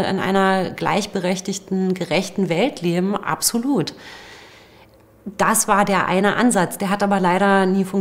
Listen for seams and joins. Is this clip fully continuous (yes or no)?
yes